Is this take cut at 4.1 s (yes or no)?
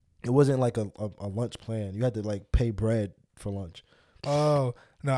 yes